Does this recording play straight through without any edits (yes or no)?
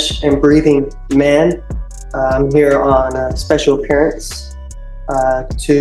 yes